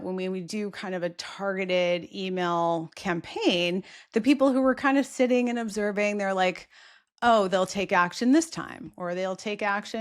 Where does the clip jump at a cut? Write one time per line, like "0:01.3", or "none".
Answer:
none